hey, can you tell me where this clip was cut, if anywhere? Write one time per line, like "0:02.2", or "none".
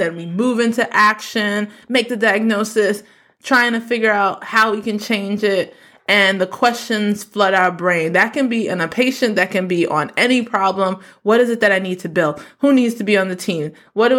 none